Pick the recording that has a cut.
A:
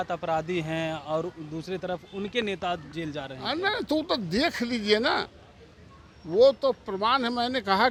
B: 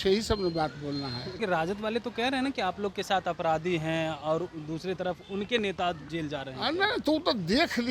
B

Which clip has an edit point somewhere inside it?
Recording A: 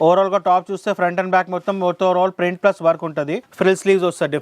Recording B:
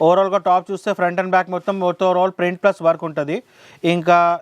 A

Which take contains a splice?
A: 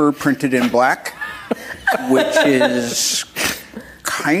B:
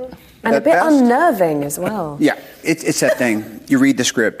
B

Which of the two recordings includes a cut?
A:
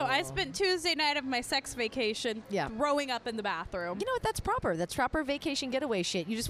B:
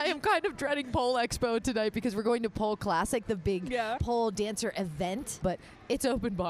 B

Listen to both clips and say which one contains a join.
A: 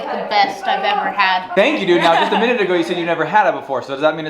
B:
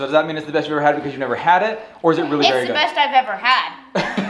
A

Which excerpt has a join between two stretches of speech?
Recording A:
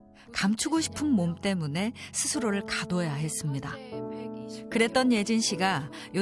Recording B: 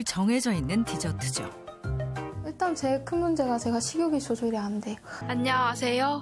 B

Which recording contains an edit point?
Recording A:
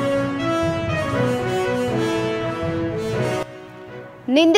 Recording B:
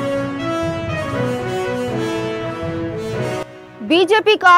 B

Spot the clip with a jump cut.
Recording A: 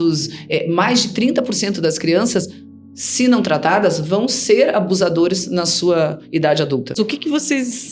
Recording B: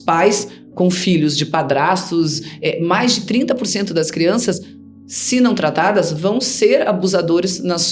A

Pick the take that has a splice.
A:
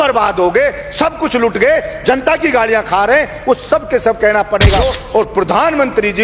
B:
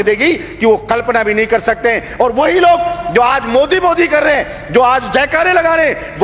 A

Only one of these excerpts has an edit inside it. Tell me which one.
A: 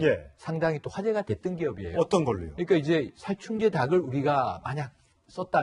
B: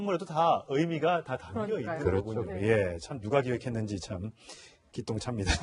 B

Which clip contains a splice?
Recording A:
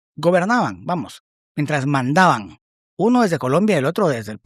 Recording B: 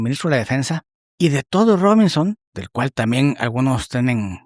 B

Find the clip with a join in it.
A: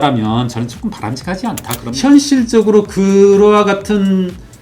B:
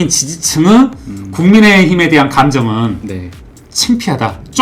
A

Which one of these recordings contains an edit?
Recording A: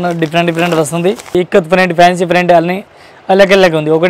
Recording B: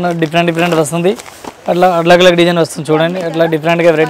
A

